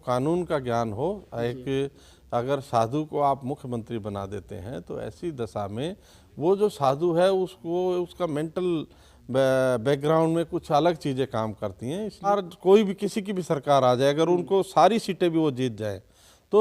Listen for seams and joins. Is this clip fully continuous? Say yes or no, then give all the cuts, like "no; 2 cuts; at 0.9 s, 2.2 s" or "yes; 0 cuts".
no; 1 cut; at 12.3 s